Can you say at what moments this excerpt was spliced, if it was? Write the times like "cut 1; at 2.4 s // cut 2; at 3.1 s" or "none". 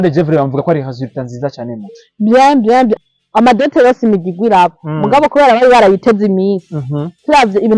cut 1; at 3.1 s